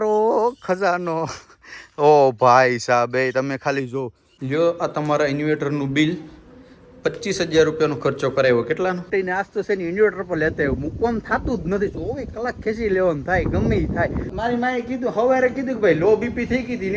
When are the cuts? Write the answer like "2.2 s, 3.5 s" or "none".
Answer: 4.3 s, 9.1 s, 14.3 s